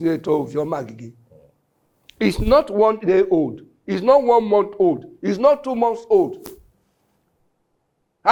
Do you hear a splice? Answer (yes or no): no